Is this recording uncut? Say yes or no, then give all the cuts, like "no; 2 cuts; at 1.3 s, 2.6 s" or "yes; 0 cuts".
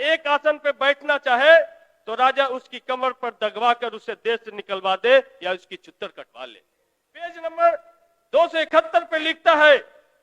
no; 1 cut; at 7.4 s